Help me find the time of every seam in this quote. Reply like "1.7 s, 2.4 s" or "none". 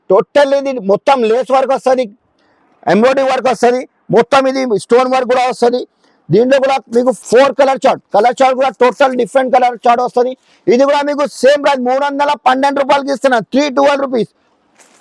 none